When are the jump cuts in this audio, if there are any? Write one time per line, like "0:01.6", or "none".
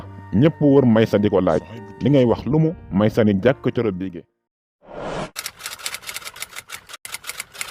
0:04.0